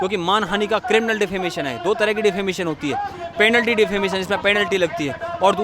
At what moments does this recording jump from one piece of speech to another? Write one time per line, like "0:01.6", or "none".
none